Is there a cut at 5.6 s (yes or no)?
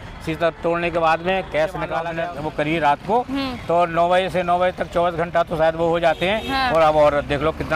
no